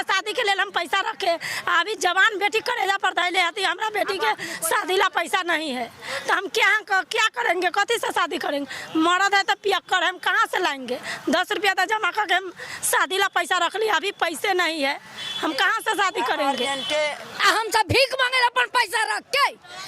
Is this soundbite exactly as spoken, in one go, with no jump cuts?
no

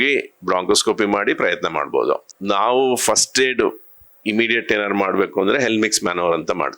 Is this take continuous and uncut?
yes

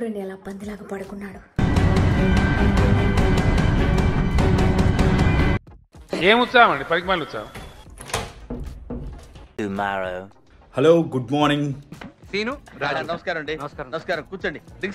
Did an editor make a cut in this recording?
no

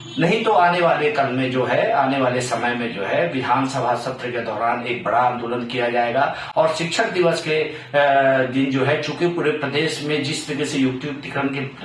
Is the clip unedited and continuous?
yes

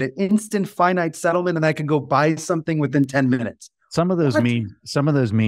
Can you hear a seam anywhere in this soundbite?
no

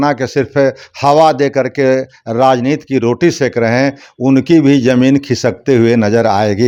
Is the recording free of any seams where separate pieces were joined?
yes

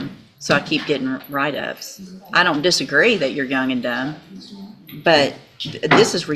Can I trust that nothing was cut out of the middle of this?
yes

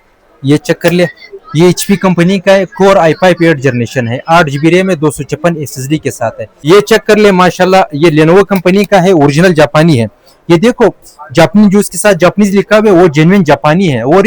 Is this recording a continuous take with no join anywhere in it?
no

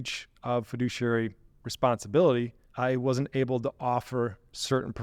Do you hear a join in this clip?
yes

